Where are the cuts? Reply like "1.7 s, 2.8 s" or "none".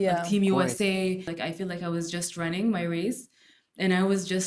1.3 s